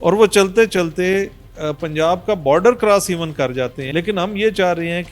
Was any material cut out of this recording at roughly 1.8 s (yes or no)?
no